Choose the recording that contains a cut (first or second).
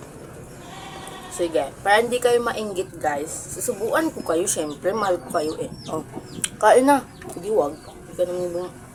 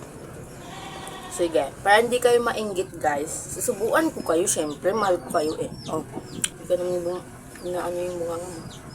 second